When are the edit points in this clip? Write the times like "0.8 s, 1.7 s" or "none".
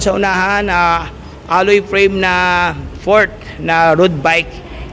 none

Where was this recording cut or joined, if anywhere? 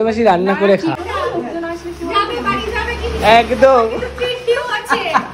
1.0 s

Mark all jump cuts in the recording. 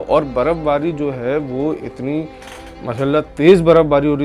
none

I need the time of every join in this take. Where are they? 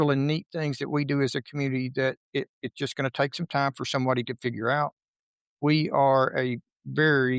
5.0 s

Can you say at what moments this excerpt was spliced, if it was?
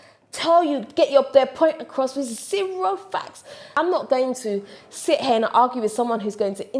3.8 s

